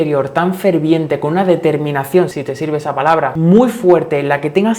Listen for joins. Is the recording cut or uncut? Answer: cut